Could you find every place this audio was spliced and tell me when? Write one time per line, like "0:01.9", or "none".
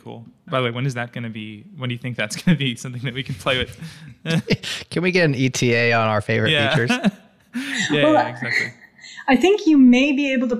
none